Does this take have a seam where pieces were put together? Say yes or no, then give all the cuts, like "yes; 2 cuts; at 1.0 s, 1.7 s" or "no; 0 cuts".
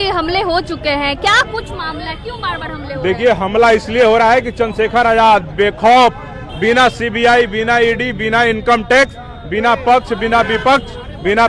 no; 0 cuts